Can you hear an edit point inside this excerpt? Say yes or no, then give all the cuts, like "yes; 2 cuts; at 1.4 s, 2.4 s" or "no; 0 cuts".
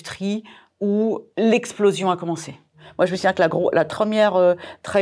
yes; 3 cuts; at 1.3 s, 2.8 s, 3.9 s